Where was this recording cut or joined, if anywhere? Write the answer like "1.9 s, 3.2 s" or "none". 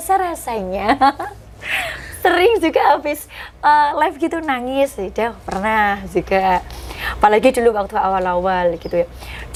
none